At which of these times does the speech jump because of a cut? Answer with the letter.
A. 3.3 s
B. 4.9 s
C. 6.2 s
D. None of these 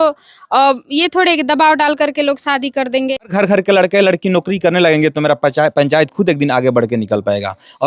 A